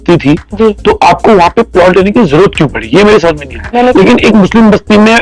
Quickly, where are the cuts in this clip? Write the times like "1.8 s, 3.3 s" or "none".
3.6 s